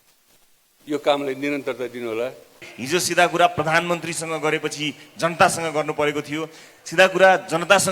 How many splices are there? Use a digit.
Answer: 1